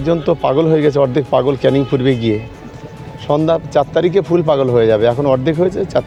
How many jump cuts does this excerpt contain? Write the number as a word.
zero